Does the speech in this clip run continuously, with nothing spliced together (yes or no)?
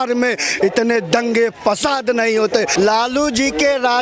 no